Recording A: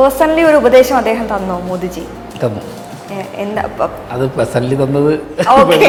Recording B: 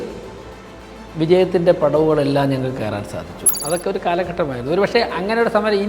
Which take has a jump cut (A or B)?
B